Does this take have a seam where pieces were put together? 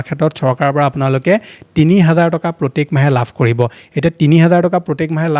no; 0 cuts

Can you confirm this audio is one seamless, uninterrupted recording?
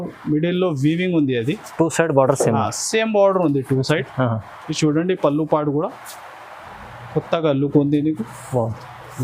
yes; 0 cuts

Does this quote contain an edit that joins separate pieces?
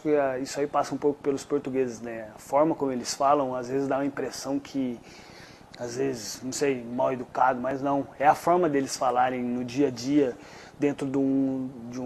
no; 0 cuts

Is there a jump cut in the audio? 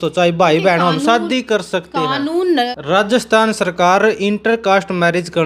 yes; 1 cut; at 2.7 s

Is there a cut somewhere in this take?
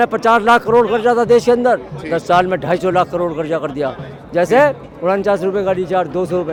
no; 0 cuts

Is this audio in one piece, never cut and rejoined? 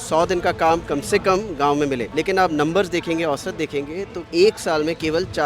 no; 2 cuts; at 2.1 s, 4.2 s

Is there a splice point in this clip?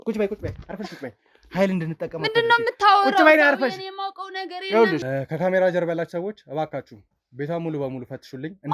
yes; 1 cut; at 5.0 s

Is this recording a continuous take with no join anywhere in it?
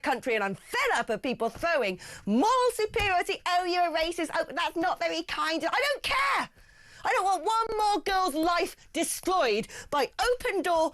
yes; 0 cuts

